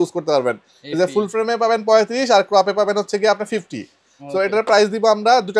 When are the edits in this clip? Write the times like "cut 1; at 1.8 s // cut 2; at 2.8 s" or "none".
none